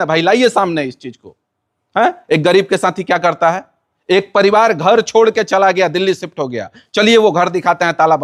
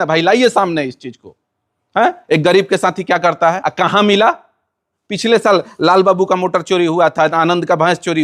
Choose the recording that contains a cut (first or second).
second